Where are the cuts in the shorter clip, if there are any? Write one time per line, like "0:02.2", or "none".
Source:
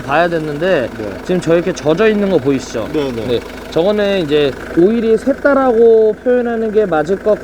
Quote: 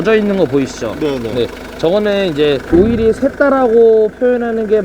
0:02.6